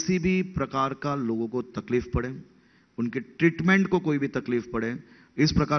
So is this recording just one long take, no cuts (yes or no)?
yes